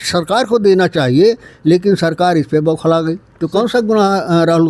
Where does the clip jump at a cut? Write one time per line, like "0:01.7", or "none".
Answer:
0:03.3